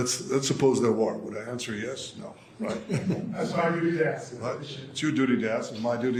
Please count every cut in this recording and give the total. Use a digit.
0